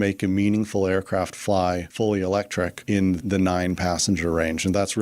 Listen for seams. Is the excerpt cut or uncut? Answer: uncut